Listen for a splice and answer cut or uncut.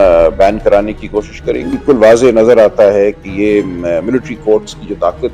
cut